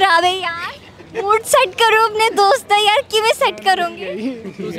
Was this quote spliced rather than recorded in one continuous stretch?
no; 0 cuts

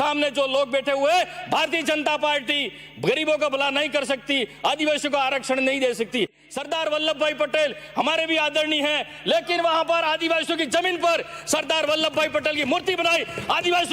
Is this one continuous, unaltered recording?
no; 1 cut; at 6.4 s

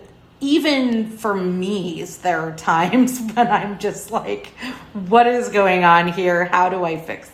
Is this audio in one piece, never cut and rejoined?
yes; 0 cuts

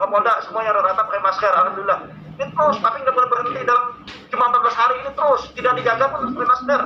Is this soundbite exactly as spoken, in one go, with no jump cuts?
yes; 0 cuts

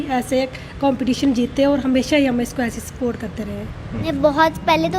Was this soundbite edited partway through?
yes; 1 cut; at 4.1 s

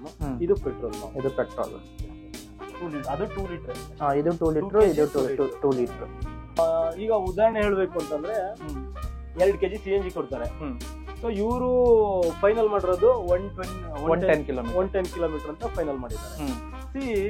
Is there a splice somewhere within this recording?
yes; 1 cut; at 6.6 s

